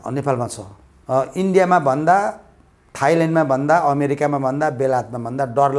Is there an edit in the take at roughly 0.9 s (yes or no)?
yes